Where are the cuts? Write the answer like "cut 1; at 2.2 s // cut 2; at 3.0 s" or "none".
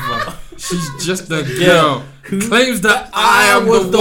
none